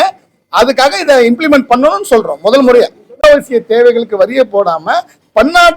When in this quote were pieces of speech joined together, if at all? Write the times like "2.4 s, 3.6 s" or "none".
3.2 s